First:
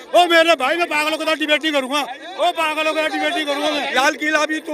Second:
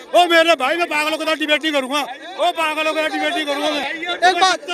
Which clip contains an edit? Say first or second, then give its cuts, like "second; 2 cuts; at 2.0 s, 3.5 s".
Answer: first; 1 cut; at 3.8 s